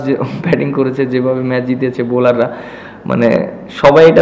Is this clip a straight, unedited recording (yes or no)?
yes